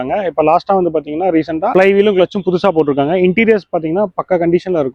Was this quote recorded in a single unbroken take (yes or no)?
yes